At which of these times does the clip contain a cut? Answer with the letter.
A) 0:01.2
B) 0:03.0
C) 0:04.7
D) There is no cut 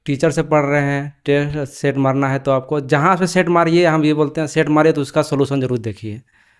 D